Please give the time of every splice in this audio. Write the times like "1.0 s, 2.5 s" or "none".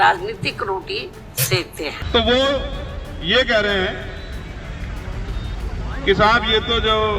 2.0 s

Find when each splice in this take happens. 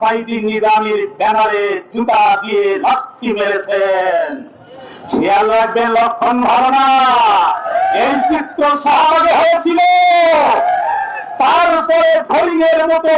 none

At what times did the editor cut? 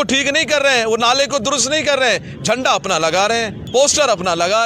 3.6 s

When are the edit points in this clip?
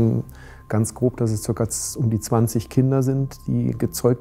none

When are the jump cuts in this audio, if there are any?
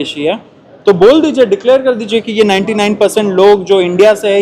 none

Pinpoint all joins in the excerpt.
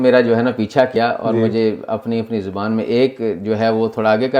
0.9 s

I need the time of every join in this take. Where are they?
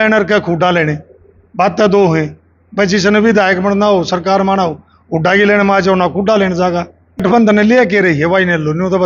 7.2 s

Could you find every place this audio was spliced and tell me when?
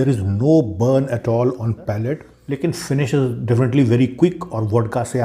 2.3 s

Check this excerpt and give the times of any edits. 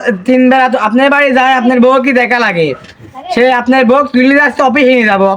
none

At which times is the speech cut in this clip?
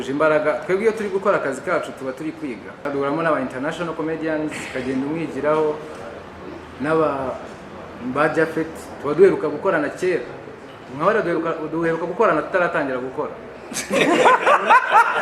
2.8 s

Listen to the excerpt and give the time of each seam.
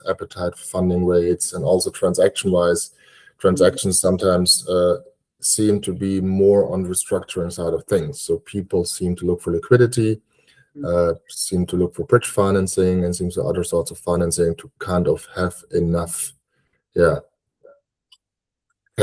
none

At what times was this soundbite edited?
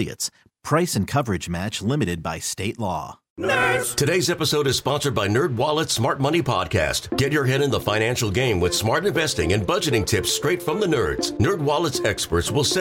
3.2 s

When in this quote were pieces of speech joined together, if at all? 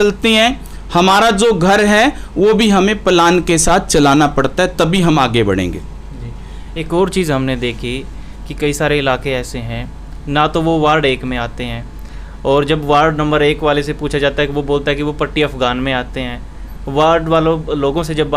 none

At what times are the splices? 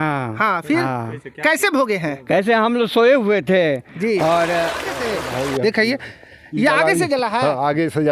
5.0 s

